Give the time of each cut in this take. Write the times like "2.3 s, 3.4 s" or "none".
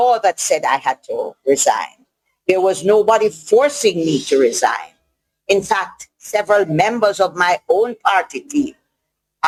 none